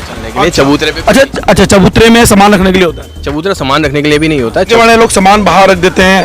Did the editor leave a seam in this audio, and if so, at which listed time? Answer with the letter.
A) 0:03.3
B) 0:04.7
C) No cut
B